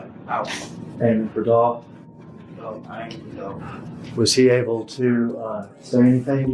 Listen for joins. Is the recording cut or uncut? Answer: cut